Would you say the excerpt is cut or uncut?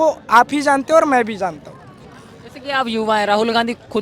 uncut